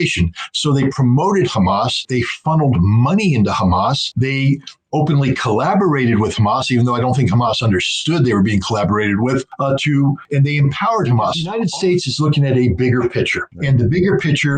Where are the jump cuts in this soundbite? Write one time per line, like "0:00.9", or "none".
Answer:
0:11.5